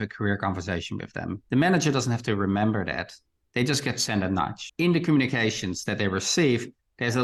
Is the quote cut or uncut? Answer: uncut